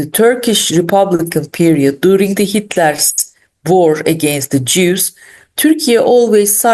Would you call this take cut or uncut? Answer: uncut